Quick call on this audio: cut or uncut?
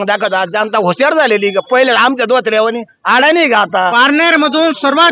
cut